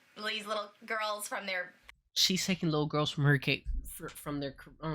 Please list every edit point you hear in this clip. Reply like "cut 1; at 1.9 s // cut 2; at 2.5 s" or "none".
cut 1; at 1.8 s